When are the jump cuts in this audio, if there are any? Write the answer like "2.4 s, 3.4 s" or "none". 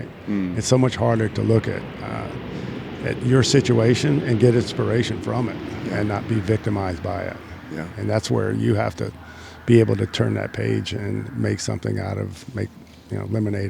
none